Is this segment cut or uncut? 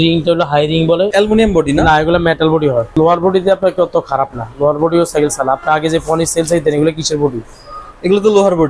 cut